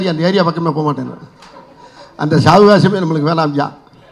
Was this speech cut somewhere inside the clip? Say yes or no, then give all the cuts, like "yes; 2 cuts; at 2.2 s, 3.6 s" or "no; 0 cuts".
no; 0 cuts